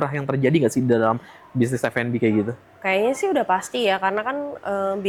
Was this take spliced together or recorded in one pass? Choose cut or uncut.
uncut